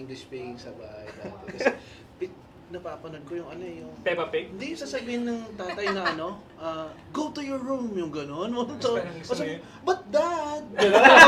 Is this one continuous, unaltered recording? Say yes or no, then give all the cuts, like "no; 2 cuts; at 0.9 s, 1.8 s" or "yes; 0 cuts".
yes; 0 cuts